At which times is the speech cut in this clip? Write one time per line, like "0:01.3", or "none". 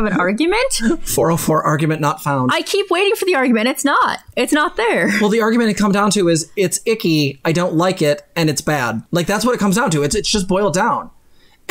none